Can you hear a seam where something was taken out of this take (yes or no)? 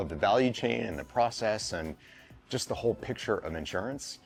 no